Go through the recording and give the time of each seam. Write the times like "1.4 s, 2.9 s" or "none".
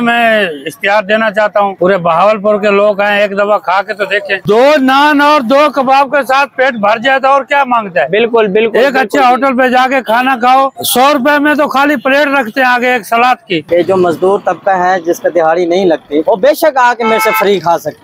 4.4 s, 13.7 s